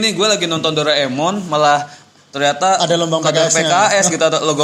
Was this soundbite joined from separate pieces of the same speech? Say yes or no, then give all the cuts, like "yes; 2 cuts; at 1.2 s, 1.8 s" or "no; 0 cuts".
no; 0 cuts